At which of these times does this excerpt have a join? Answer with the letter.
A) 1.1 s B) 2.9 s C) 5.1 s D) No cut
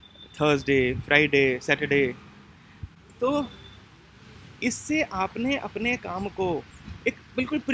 D